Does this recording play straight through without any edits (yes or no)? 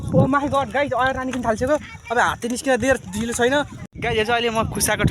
no